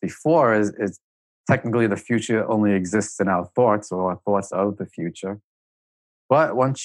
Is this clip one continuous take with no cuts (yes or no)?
no